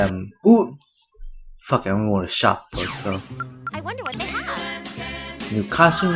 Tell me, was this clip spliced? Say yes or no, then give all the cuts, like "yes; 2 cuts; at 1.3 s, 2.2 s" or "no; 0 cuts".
no; 0 cuts